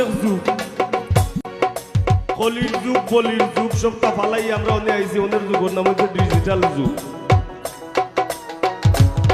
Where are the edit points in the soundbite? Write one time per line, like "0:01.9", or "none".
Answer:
0:01.1